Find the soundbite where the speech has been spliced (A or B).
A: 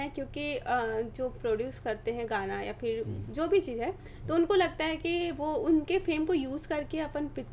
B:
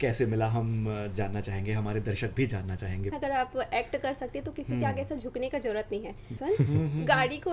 B